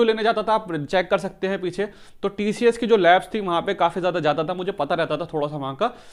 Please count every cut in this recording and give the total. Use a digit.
0